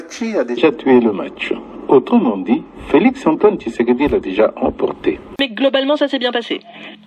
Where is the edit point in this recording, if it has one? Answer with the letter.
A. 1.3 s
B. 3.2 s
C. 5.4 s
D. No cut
C